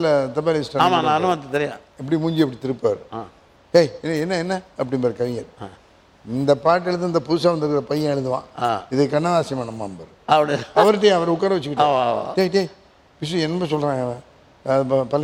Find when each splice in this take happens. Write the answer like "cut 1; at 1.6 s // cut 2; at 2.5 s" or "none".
none